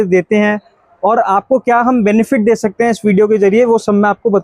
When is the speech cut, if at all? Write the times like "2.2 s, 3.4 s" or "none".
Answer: none